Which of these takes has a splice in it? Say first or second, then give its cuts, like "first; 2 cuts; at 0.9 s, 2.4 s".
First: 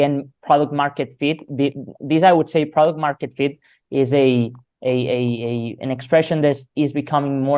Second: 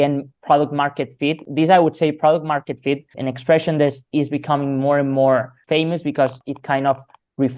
second; 4 cuts; at 1.4 s, 3.1 s, 5.6 s, 6.4 s